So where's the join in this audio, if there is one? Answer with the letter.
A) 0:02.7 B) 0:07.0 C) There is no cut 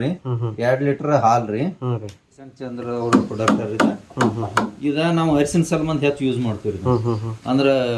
A